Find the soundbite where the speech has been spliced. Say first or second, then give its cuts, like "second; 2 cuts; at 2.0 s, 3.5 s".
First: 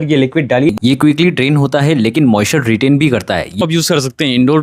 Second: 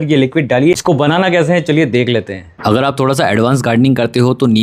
first; 2 cuts; at 0.7 s, 3.6 s